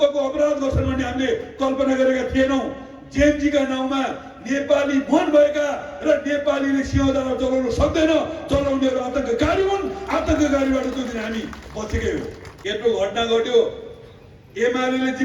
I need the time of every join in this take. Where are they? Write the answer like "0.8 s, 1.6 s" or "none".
12.5 s

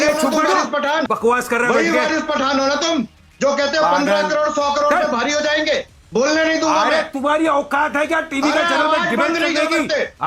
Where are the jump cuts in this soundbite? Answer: 1.0 s

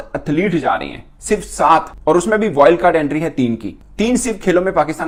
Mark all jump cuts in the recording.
none

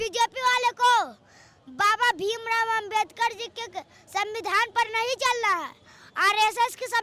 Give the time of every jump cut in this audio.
none

